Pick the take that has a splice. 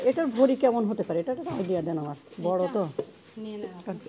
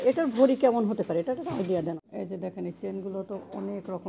second; 1 cut; at 2.0 s

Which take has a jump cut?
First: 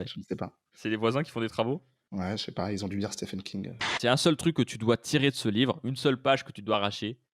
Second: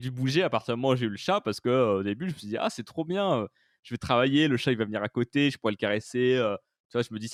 first; 1 cut; at 3.9 s

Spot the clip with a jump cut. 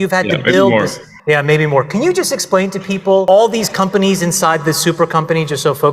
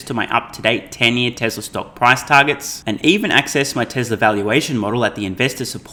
first; 2 cuts; at 1.1 s, 3.2 s

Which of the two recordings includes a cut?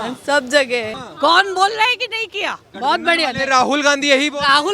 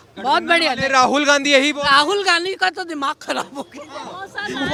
first; 1 cut; at 1.0 s

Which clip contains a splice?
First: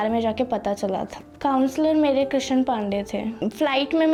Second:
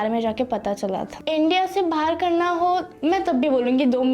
second; 1 cut; at 1.1 s

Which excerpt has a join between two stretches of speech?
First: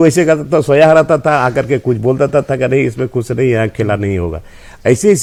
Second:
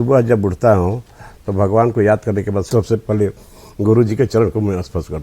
second; 1 cut; at 2.7 s

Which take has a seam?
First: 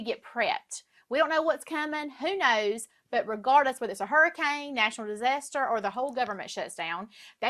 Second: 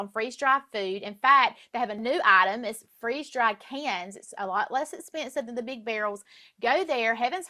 first; 1 cut; at 2.1 s

